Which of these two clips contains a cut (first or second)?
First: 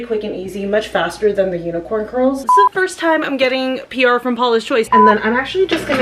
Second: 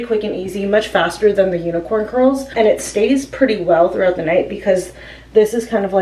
first